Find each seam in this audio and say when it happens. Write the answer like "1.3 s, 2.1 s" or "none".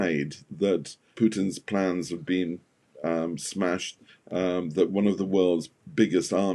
1.1 s